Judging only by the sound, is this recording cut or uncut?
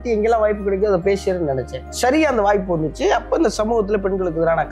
uncut